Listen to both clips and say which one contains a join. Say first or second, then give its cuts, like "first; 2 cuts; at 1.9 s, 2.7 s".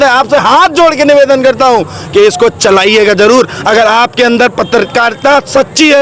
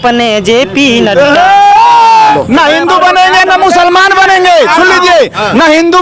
second; 1 cut; at 2.3 s